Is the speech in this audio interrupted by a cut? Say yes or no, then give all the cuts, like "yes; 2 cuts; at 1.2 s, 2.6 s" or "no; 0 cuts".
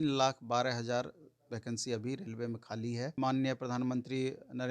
yes; 1 cut; at 3.1 s